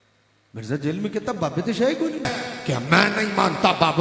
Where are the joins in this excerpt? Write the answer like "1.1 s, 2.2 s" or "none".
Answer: 2.3 s

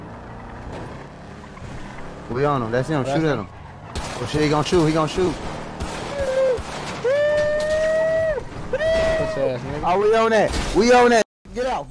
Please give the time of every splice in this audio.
none

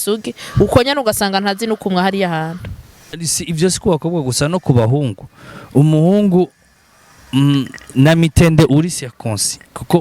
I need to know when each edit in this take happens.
3.2 s

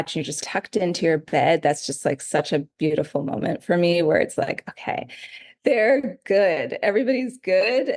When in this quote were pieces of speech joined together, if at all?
none

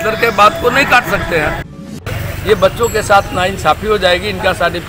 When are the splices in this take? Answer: 2.1 s

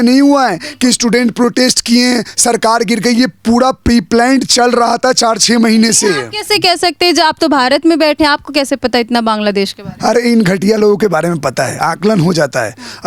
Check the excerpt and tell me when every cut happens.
none

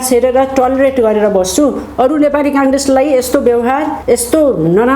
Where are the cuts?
4.0 s

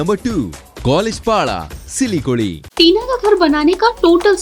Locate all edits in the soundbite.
2.6 s

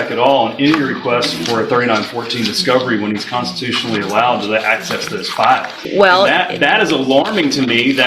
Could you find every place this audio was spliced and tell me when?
5.8 s

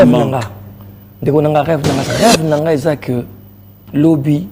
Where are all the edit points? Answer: 2.1 s

